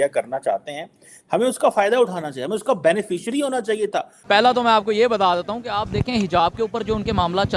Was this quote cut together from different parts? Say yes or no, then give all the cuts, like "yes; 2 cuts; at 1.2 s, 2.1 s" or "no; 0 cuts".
yes; 1 cut; at 4.1 s